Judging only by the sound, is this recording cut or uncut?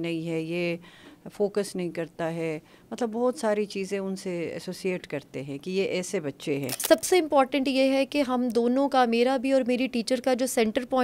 cut